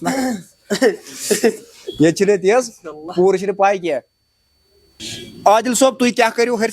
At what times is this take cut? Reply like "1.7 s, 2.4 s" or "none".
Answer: 4.8 s